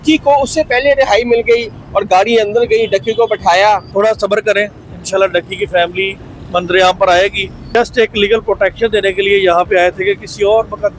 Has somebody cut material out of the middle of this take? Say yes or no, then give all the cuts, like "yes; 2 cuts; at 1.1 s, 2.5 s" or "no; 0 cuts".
yes; 2 cuts; at 3.9 s, 7.5 s